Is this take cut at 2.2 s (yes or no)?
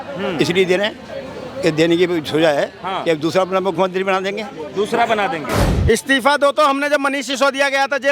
no